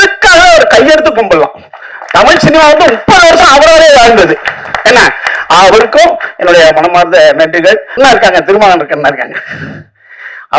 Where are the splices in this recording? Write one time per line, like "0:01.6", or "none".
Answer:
0:07.9